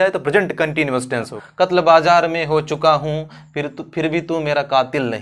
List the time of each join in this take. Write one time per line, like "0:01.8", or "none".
0:01.3